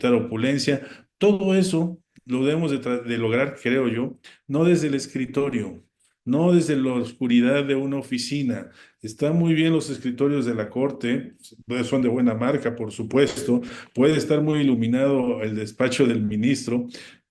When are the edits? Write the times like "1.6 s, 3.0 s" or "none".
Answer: none